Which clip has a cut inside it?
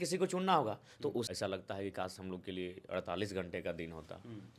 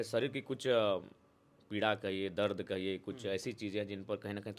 first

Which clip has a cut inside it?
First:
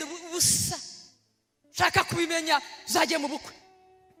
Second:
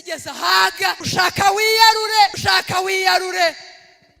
second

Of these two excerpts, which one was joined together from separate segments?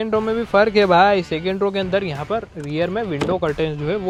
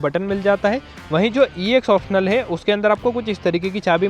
second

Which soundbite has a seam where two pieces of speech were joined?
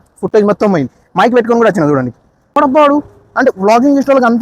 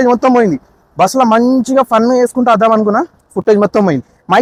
first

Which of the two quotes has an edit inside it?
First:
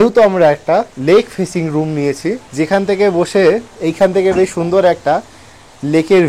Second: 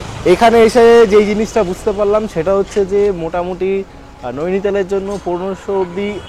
first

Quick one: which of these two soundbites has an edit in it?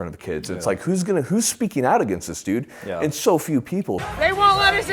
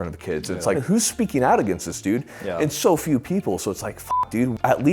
second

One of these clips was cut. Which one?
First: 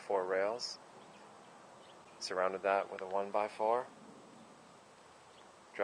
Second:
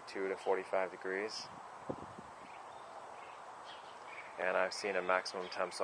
first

